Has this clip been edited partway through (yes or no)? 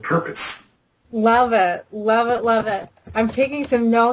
no